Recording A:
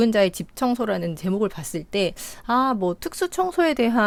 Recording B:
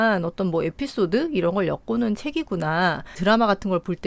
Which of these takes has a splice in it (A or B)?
B